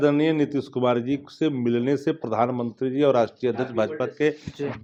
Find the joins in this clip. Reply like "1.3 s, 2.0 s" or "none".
none